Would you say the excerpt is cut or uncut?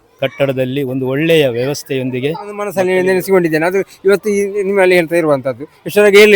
cut